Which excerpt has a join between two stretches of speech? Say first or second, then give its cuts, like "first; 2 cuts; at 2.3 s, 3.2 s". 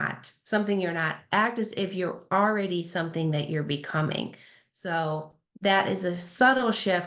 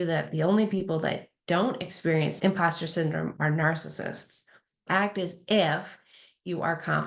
second; 2 cuts; at 2.4 s, 4.8 s